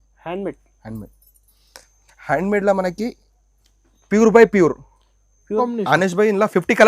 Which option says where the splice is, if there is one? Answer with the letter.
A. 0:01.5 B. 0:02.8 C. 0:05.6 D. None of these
C